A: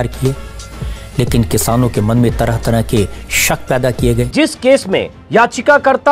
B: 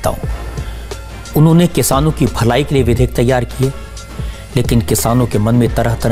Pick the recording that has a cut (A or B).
A